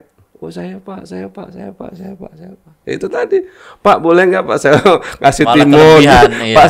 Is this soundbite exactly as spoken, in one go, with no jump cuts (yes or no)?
yes